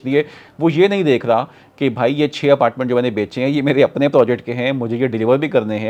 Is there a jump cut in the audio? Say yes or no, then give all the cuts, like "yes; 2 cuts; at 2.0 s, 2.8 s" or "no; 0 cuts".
no; 0 cuts